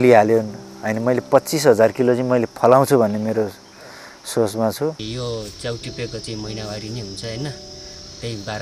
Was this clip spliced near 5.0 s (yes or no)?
yes